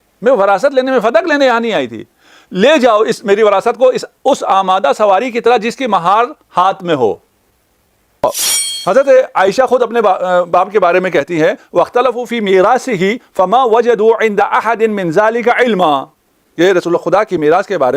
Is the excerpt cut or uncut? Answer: cut